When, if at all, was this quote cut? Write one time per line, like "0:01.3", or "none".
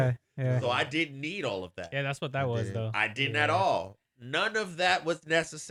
none